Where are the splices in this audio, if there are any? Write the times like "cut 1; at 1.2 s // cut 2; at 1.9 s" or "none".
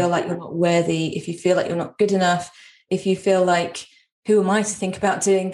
none